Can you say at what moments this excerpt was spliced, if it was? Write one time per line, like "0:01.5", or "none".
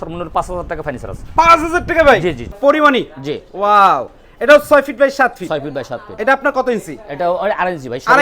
0:02.5